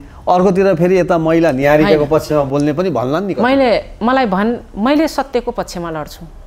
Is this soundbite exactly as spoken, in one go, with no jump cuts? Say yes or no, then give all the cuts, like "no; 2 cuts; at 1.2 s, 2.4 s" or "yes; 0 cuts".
yes; 0 cuts